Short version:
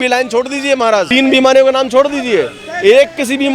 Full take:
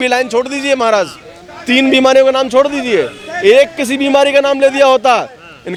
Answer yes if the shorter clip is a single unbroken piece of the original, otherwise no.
no